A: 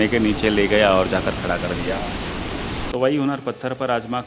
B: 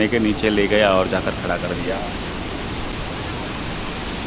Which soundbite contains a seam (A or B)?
A